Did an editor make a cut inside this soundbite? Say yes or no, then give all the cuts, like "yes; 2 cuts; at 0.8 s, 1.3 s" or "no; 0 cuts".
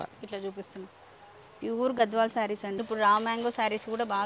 yes; 1 cut; at 2.8 s